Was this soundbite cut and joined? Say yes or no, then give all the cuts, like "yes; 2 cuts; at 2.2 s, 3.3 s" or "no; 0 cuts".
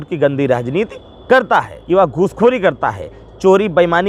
yes; 1 cut; at 1.7 s